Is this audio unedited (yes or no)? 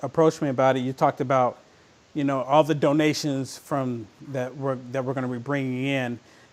yes